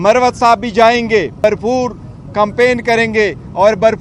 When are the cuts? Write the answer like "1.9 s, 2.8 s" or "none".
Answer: 1.4 s